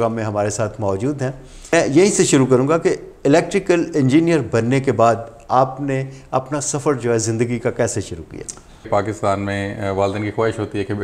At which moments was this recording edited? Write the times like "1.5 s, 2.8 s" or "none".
1.7 s, 8.9 s